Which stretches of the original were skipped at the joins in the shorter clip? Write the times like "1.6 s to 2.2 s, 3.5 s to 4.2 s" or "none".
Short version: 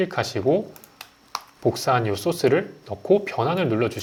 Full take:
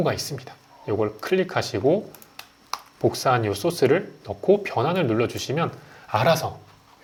none